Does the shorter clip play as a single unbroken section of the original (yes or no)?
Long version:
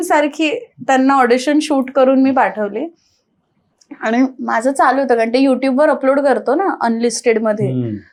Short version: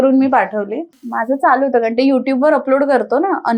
no